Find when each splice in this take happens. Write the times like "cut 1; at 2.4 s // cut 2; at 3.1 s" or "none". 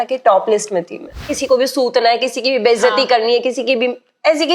cut 1; at 1.3 s